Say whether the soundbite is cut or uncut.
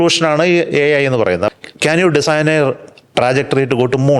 cut